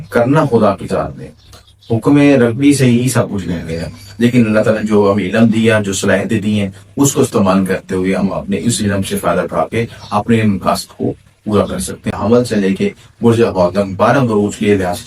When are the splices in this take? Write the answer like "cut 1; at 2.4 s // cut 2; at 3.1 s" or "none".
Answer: cut 1; at 12.1 s